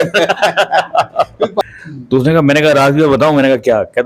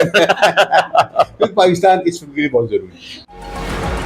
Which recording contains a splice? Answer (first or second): first